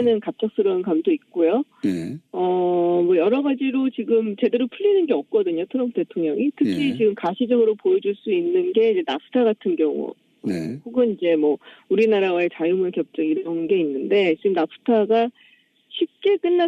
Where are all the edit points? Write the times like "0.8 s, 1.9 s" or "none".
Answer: none